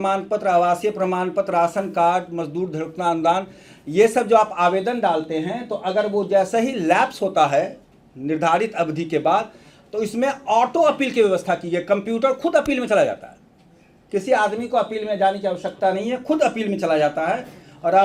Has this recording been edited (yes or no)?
no